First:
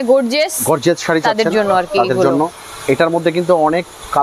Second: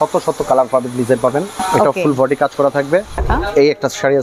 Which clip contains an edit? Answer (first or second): second